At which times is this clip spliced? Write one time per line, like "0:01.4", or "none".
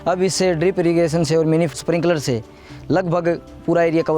0:01.8